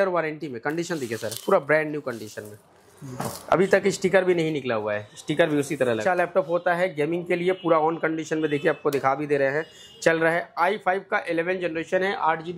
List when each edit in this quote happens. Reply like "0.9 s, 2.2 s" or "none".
6.0 s